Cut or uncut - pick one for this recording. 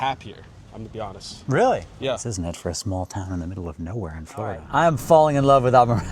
cut